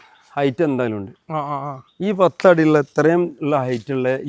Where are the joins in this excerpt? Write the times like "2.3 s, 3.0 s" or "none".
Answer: none